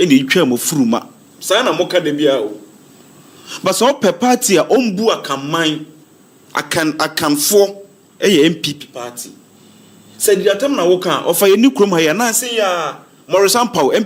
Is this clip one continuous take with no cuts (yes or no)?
yes